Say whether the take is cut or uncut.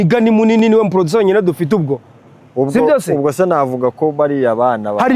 uncut